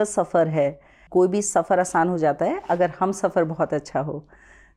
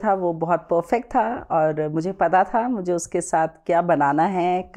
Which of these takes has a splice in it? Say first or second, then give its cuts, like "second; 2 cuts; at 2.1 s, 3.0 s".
first; 1 cut; at 1.0 s